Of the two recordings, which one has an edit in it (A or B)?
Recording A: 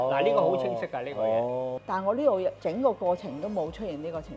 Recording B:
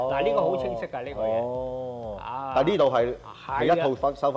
A